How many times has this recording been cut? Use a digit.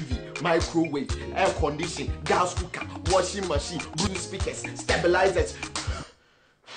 1